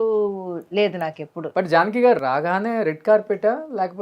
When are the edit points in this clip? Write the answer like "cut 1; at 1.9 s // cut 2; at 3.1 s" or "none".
cut 1; at 1.4 s

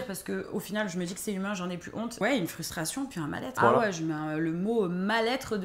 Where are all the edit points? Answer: cut 1; at 2.2 s // cut 2; at 3.6 s

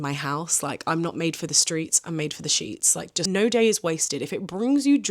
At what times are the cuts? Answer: cut 1; at 3.2 s

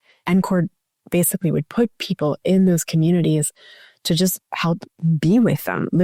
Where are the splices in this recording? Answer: none

